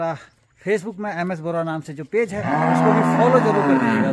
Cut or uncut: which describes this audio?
uncut